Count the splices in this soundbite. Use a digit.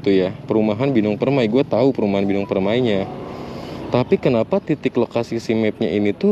0